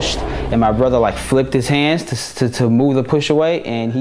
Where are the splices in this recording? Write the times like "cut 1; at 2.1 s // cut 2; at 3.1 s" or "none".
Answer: none